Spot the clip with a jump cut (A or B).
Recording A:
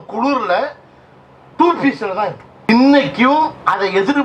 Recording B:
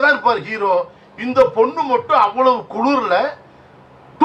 A